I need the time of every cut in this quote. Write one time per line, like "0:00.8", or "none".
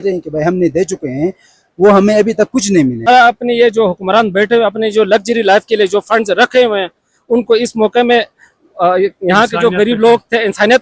0:03.1